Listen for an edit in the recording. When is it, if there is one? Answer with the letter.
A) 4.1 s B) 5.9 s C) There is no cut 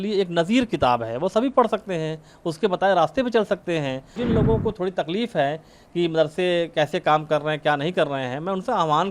A